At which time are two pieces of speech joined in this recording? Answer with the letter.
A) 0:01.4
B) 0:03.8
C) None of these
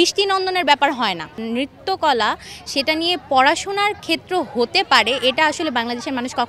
A